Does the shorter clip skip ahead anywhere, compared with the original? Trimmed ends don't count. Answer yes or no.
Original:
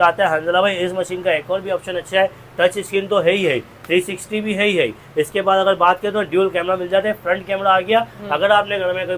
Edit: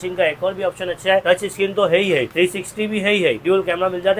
yes